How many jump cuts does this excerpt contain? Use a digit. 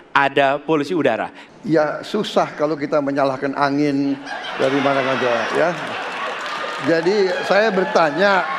1